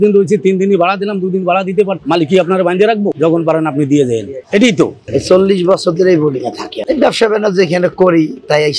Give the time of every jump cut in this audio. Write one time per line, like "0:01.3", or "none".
0:03.1
0:05.0